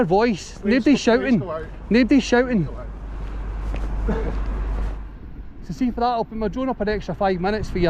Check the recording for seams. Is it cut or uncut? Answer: uncut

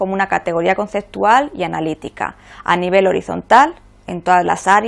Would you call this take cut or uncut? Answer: cut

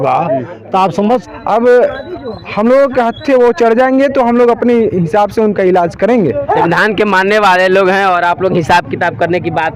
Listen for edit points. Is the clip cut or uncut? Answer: cut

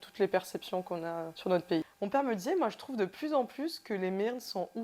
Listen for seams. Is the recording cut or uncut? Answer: cut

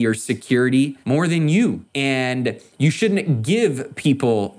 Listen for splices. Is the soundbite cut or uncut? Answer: cut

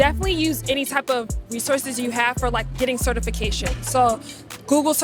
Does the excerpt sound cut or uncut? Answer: uncut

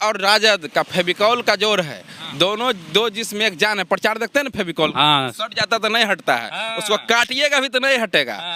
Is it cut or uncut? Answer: uncut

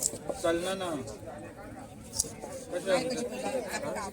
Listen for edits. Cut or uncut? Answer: uncut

